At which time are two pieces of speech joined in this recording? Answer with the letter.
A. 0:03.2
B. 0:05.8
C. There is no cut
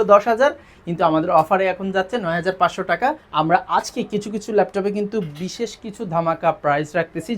A